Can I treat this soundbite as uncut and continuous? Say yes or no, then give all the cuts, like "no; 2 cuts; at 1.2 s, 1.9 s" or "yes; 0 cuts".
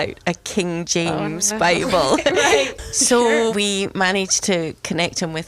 no; 2 cuts; at 2.7 s, 3.5 s